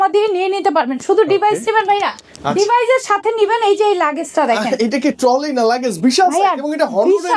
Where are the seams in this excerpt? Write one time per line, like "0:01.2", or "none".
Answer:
none